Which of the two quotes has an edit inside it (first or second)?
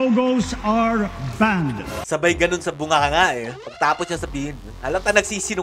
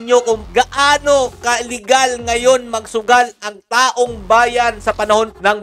first